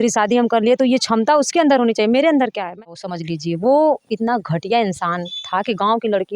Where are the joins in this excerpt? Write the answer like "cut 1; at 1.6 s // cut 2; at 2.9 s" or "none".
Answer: cut 1; at 2.8 s